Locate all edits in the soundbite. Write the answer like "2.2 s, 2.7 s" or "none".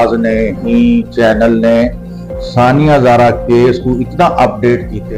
none